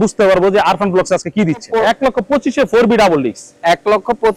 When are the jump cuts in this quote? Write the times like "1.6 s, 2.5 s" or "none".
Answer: 1.7 s